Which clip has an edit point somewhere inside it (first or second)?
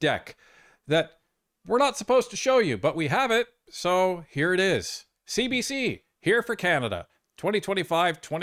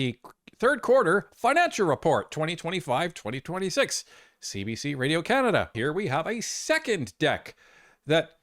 second